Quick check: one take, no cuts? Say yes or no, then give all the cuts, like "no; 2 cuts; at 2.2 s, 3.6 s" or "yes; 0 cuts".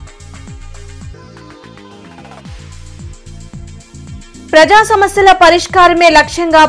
yes; 0 cuts